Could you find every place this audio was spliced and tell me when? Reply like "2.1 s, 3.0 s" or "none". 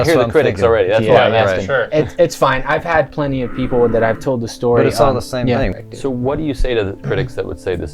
5.7 s

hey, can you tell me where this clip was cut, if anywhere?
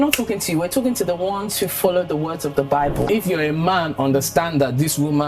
3.1 s

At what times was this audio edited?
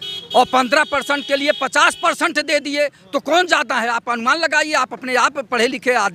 none

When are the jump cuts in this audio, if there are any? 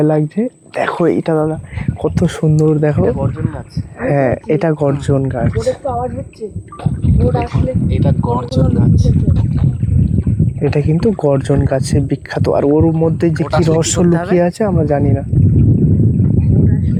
none

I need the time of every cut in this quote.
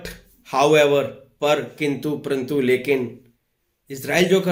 none

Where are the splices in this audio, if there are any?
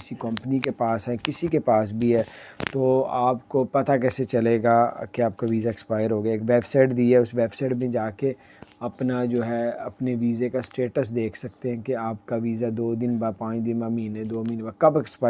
none

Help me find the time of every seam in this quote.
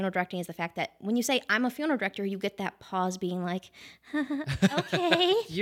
none

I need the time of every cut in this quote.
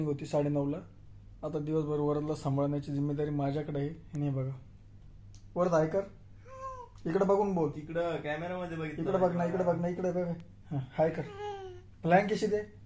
none

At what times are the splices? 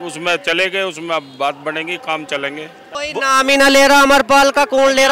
3.0 s

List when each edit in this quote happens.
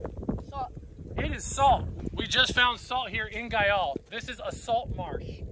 none

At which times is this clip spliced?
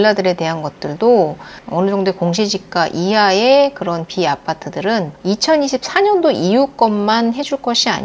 1.6 s

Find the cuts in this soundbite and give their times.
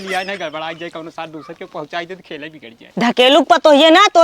3.0 s

